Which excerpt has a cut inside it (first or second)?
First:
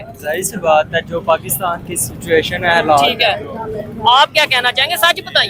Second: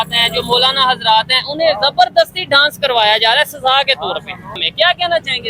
second